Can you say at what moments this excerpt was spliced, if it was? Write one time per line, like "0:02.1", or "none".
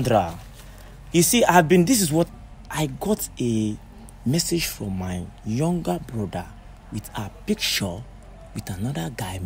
0:02.3